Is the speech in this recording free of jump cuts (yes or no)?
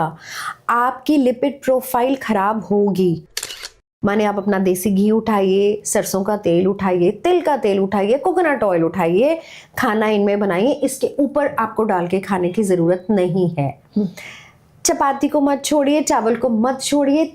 no